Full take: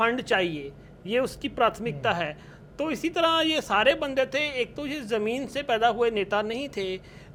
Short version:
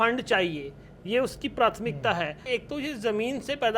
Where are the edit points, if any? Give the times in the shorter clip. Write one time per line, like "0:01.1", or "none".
0:02.4

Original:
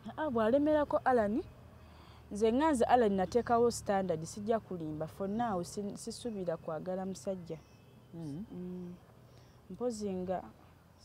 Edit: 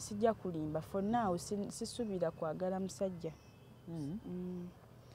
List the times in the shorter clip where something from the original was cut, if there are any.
none

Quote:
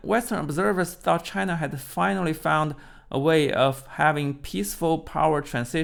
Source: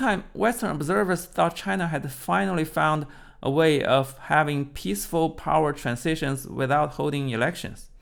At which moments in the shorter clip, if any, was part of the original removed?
none

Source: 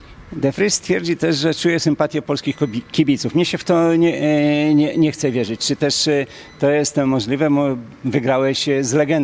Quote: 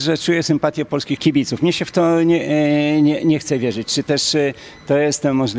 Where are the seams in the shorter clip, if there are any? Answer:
0:01.2

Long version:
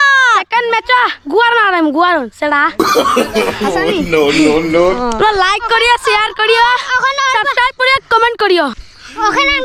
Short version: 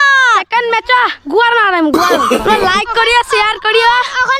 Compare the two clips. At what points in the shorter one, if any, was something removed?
0:02.3

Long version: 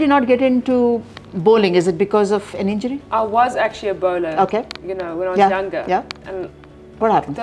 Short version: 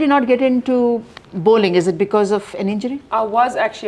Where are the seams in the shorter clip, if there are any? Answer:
none

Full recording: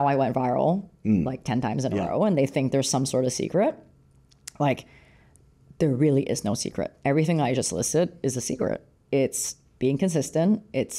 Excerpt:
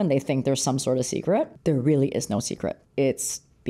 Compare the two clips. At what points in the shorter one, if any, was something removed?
0:01.5
0:02.8

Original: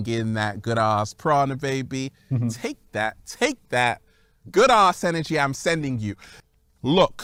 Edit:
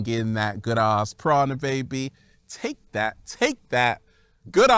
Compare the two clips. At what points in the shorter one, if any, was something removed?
none

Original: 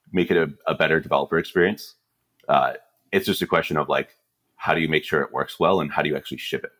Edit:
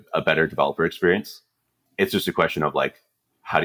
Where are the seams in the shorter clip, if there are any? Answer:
0:01.7

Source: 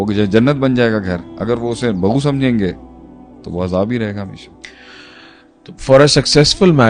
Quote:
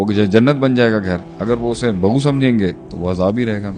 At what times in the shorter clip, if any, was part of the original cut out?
0:02.9

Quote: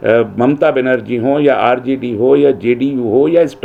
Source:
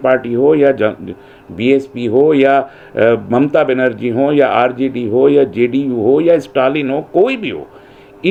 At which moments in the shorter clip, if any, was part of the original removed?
none

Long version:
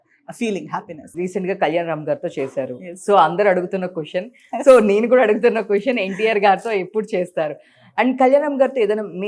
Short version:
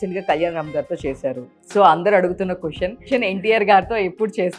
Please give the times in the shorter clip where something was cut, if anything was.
0:03.1

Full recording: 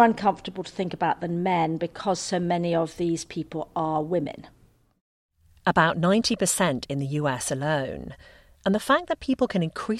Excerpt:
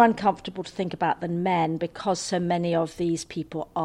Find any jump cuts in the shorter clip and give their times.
none

